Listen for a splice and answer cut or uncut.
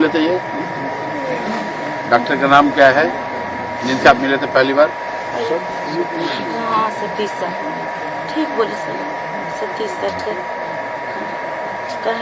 uncut